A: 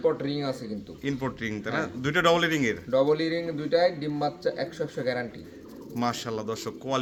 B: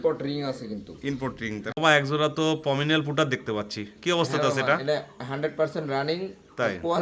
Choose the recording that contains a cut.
B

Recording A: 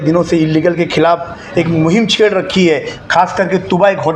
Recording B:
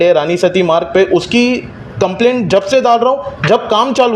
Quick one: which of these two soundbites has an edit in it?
A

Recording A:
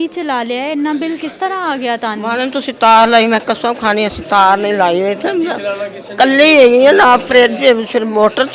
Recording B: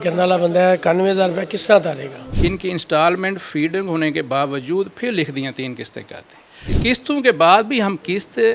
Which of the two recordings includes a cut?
B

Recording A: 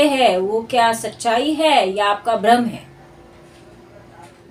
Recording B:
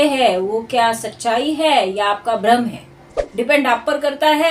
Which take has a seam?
B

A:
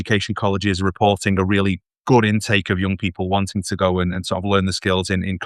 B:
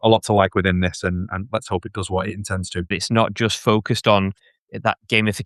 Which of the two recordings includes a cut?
B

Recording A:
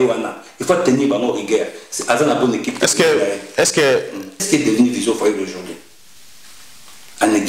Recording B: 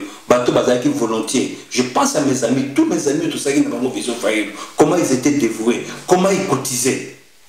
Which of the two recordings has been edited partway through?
A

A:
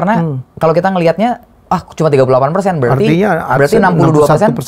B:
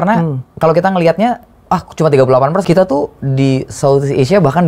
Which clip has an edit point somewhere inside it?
B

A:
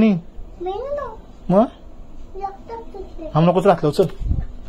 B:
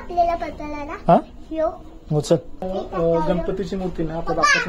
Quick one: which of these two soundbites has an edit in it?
B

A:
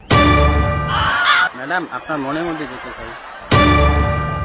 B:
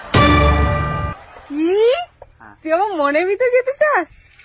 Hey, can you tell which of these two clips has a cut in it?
A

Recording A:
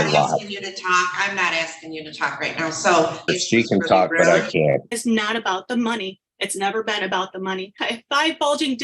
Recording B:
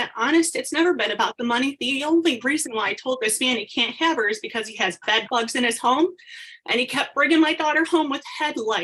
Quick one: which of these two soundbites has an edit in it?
A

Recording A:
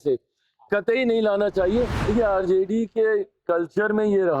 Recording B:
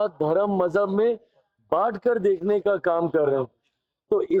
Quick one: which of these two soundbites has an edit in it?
A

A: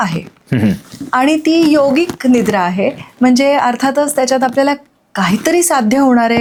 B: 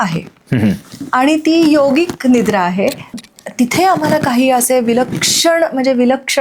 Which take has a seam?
B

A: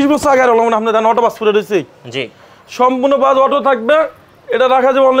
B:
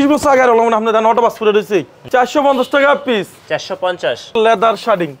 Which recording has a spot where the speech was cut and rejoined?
B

